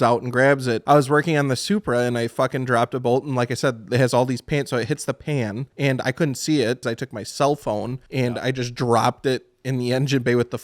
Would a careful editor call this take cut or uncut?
cut